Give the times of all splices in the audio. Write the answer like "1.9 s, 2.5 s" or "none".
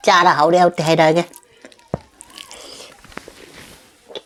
none